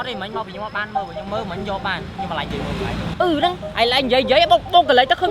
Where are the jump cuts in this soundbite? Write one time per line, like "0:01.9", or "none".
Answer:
none